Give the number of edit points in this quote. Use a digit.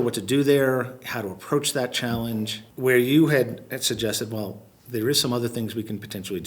1